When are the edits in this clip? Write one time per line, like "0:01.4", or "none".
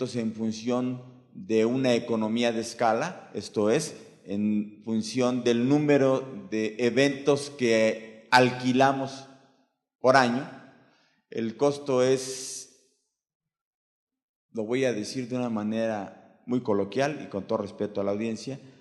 none